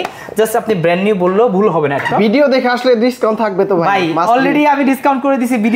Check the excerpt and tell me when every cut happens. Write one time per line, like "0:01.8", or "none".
0:02.1